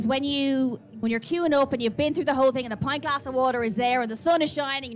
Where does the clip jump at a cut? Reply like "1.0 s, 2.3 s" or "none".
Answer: 1.0 s